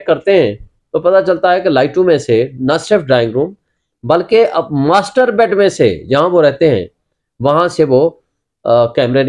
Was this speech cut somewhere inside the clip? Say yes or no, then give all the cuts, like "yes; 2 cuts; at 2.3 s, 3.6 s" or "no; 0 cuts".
no; 0 cuts